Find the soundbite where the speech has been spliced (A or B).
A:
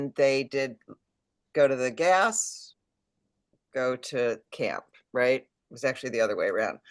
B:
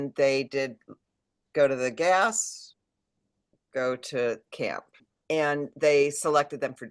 B